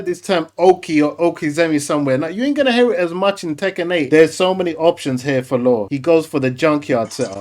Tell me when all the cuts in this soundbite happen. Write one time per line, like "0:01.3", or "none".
0:04.0